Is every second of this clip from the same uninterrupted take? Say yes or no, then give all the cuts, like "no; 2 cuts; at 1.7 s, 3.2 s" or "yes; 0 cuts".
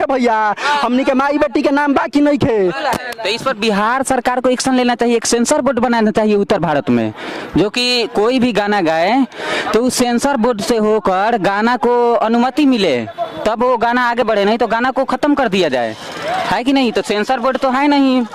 yes; 0 cuts